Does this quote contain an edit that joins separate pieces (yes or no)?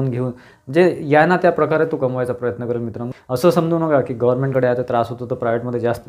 yes